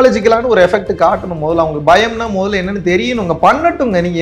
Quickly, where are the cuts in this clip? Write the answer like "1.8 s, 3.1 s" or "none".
none